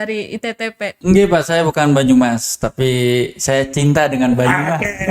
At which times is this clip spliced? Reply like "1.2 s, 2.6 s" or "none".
1.0 s